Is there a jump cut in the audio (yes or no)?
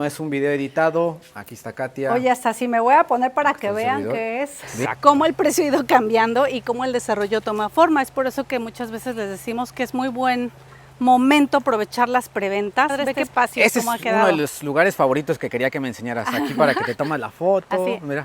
yes